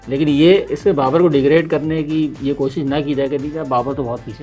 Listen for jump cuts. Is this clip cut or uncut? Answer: uncut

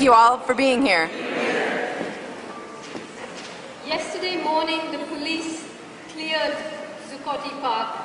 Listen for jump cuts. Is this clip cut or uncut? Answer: cut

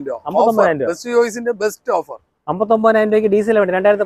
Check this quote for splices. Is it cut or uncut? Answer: uncut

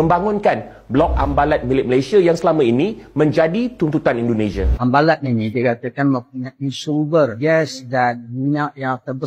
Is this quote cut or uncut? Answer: cut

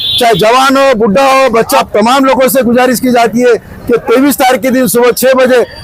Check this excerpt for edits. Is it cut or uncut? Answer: cut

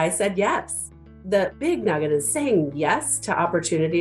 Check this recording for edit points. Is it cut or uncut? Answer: cut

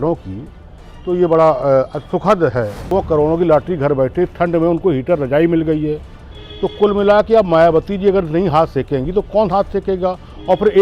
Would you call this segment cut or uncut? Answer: cut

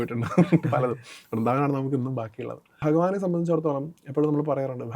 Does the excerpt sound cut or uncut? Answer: cut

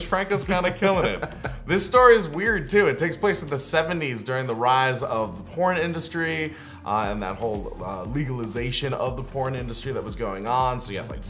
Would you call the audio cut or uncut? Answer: cut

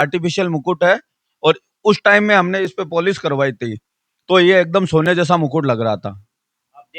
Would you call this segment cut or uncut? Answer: uncut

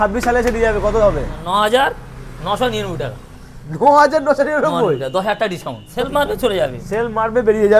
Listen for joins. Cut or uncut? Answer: cut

